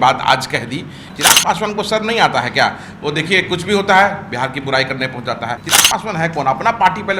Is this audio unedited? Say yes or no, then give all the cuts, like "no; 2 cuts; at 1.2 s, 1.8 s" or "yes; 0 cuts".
no; 2 cuts; at 1.1 s, 5.6 s